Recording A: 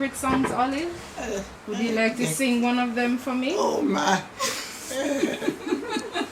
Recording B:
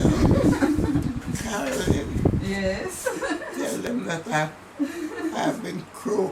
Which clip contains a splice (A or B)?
A